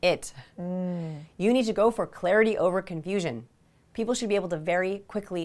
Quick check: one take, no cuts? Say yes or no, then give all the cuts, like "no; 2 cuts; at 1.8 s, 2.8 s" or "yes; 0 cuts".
yes; 0 cuts